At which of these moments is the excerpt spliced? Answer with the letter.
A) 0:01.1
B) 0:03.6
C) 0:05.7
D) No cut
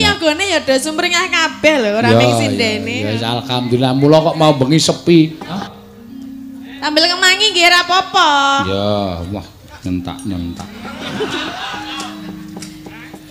C